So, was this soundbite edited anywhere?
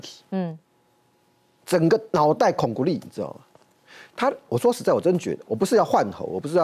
no; 0 cuts

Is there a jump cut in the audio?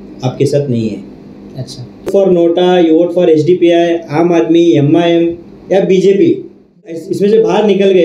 yes; 2 cuts; at 2.1 s, 7.1 s

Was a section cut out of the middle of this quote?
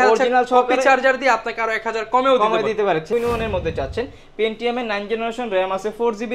yes; 1 cut; at 3.1 s

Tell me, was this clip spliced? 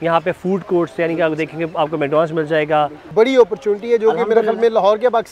yes; 1 cut; at 3.1 s

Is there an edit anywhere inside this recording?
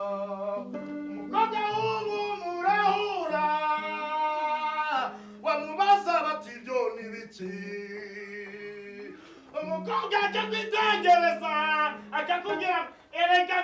no; 0 cuts

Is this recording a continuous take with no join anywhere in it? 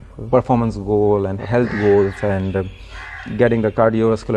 yes; 0 cuts

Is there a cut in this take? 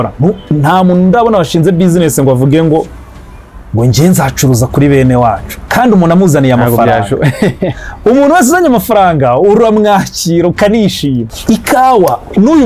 yes; 1 cut; at 11.3 s

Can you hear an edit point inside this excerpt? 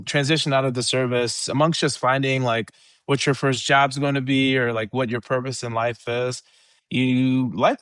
no; 0 cuts

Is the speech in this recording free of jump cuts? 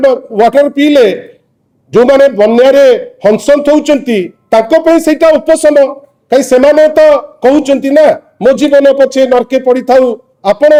yes; 0 cuts

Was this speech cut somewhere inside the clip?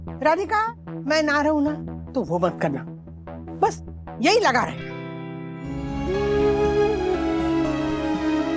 yes; 1 cut; at 5.7 s

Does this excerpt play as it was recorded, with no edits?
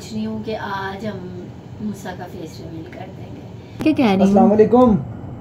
no; 1 cut; at 3.8 s

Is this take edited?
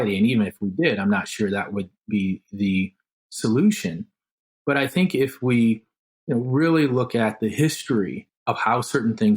yes; 1 cut; at 8.3 s

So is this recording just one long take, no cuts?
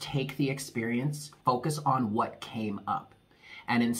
no; 1 cut; at 1.3 s

